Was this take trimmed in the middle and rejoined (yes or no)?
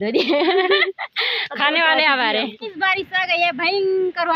yes